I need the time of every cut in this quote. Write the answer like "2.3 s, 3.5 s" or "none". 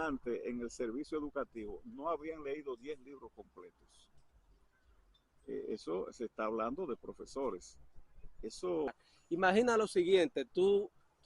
8.9 s